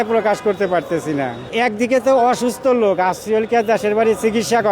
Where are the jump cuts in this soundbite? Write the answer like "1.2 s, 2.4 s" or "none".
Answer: 1.5 s